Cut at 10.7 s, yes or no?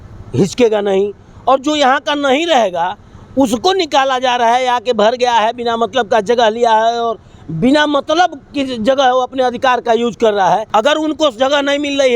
yes